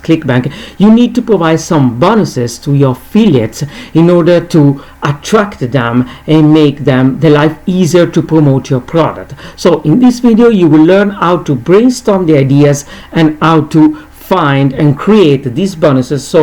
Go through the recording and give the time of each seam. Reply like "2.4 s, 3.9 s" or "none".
none